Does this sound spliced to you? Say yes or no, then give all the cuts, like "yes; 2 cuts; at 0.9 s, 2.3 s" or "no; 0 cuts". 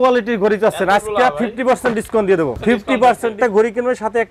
yes; 2 cuts; at 2.6 s, 3.3 s